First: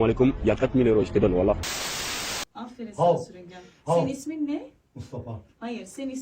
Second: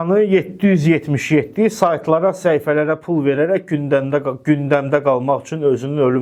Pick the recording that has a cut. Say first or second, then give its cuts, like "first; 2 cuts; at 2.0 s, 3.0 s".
first; 1 cut; at 2.2 s